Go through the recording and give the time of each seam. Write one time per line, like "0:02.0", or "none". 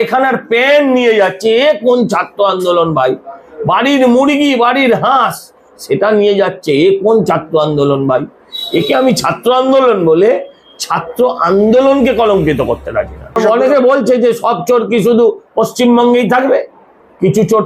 0:13.3

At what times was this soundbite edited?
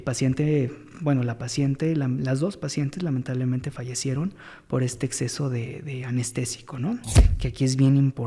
0:07.2

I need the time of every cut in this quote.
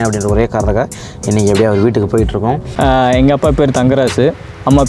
0:02.7

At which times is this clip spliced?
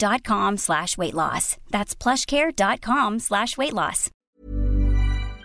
0:04.2

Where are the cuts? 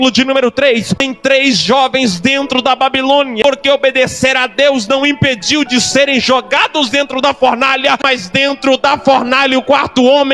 0:00.9
0:03.4
0:08.0

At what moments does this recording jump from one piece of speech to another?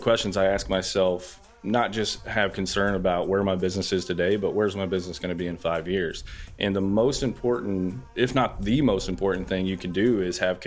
0:01.4
0:08.0

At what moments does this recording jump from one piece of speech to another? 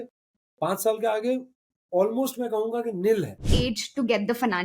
0:03.5

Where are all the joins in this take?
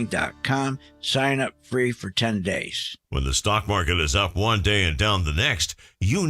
0:02.9

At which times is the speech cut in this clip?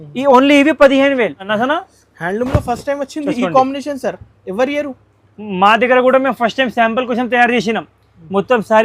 0:01.5

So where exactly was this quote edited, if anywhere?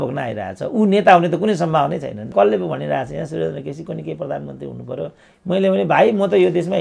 0:02.3

